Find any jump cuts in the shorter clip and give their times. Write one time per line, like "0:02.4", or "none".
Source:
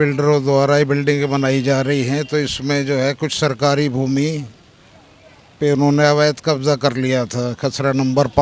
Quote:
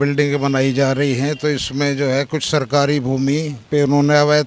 0:03.6